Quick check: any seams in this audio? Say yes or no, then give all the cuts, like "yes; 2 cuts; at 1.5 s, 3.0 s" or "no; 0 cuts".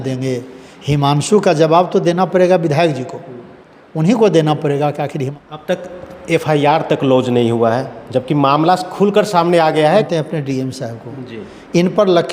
yes; 2 cuts; at 5.3 s, 10.1 s